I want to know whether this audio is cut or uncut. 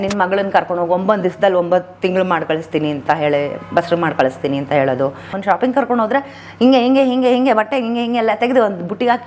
cut